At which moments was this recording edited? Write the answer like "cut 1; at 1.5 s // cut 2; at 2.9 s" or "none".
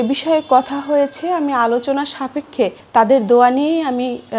cut 1; at 2.8 s

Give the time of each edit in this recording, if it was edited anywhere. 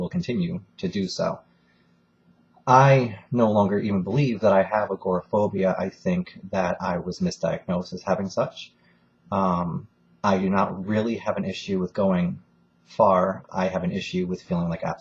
cut 1; at 3.3 s

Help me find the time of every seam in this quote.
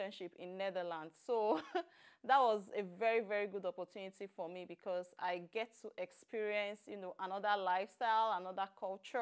none

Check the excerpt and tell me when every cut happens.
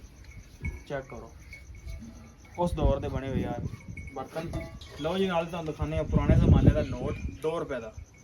cut 1; at 4.9 s

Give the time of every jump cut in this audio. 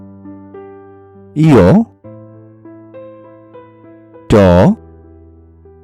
cut 1; at 1.0 s // cut 2; at 2.0 s // cut 3; at 4.0 s // cut 4; at 4.8 s

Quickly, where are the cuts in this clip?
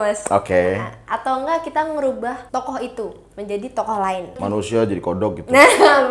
cut 1; at 2.4 s // cut 2; at 4.4 s

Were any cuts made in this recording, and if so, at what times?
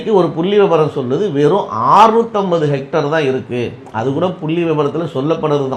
none

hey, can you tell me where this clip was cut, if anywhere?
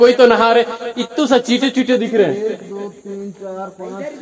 none

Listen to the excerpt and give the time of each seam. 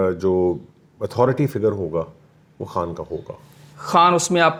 none

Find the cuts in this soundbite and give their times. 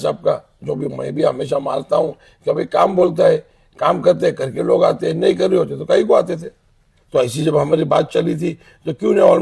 cut 1; at 6.9 s

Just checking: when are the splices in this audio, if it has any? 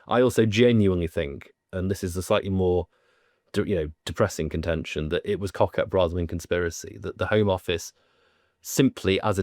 none

